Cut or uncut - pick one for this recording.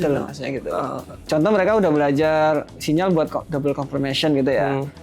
cut